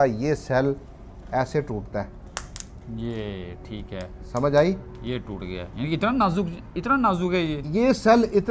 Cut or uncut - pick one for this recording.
uncut